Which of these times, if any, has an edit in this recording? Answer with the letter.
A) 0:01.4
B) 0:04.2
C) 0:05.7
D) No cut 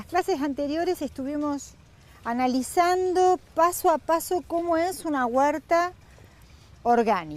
B